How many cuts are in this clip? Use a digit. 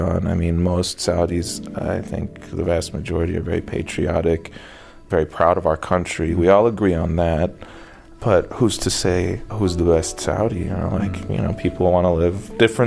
1